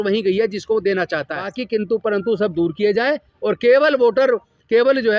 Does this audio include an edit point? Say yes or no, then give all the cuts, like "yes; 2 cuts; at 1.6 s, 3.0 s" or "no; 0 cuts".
yes; 1 cut; at 1.5 s